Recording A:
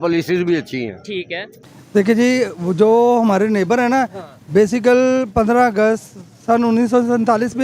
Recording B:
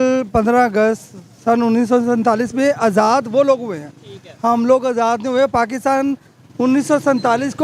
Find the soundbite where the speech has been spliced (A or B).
A